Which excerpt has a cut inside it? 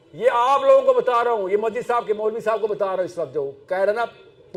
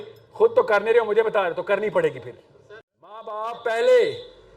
second; 1 cut; at 3.4 s

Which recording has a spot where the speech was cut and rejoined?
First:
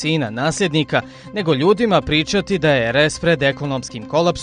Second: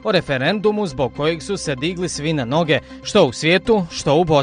first; 1 cut; at 1.9 s

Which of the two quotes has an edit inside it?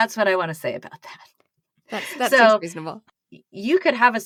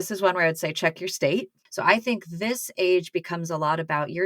second; 1 cut; at 1.6 s

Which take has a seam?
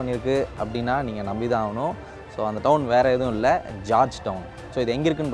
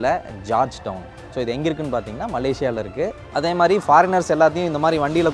second; 1 cut; at 3.3 s

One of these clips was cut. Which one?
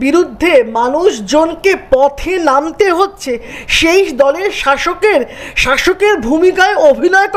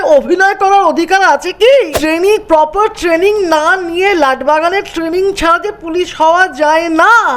second; 1 cut; at 2.0 s

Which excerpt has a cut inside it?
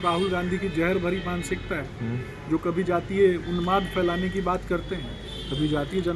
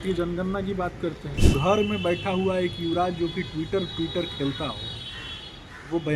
second; 1 cut; at 1.3 s

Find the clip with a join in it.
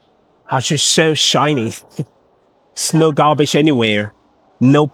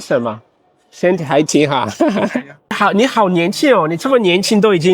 second; 1 cut; at 2.8 s

